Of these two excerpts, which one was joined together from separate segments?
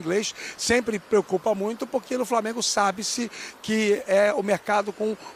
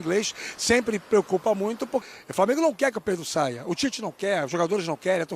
second; 1 cut; at 2.1 s

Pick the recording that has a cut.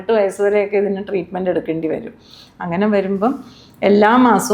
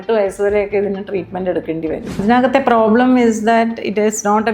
second; 1 cut; at 2.2 s

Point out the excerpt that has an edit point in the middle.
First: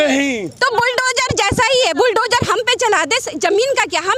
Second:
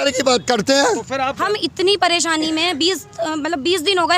second; 1 cut; at 1.4 s

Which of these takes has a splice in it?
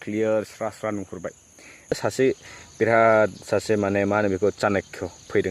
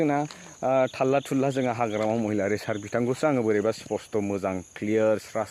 first; 1 cut; at 1.9 s

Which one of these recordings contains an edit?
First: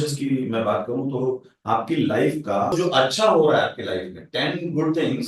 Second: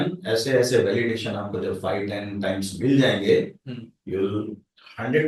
first; 1 cut; at 2.7 s

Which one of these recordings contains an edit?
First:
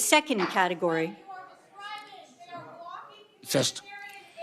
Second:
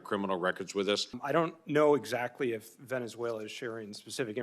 second; 1 cut; at 1.2 s

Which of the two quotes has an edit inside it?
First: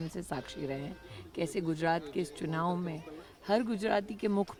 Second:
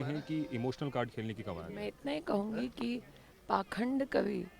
second; 1 cut; at 2.3 s

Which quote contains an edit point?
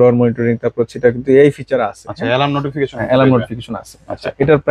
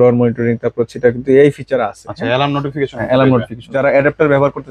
second; 1 cut; at 3.6 s

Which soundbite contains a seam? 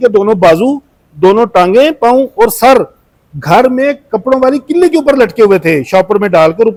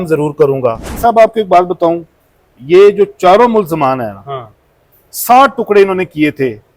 second; 1 cut; at 0.9 s

